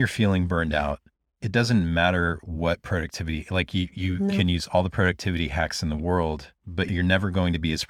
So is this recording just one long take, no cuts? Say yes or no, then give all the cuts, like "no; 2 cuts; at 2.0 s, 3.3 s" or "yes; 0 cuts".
no; 1 cut; at 6.9 s